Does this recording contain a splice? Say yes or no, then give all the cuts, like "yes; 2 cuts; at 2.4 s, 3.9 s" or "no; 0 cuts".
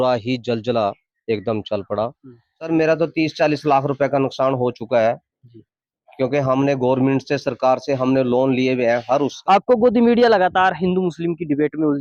yes; 2 cuts; at 2.7 s, 9.4 s